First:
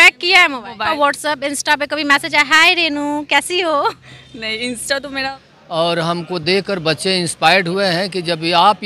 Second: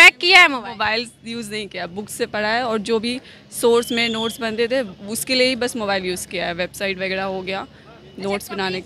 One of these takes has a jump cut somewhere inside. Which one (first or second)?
first